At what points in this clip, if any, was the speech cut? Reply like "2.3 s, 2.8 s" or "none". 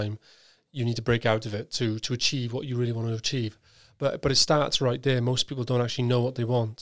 none